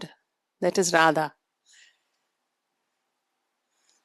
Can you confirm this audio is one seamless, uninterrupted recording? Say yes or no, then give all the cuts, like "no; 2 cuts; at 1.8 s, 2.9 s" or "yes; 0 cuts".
yes; 0 cuts